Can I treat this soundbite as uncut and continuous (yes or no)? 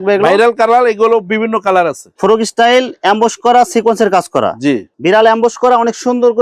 no